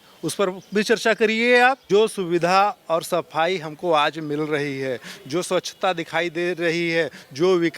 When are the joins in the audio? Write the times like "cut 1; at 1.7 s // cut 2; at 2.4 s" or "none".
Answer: cut 1; at 1.8 s